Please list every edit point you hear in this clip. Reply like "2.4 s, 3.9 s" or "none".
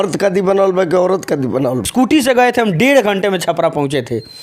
1.9 s